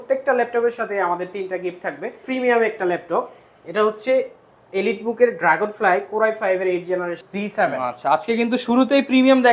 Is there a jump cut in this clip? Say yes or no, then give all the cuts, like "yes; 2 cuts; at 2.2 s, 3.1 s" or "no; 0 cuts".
yes; 2 cuts; at 2.2 s, 7.2 s